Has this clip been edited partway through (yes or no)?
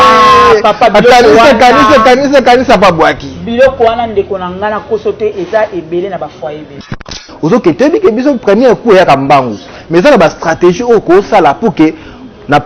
yes